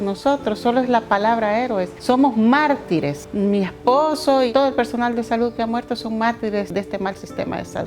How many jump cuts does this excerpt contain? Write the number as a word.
four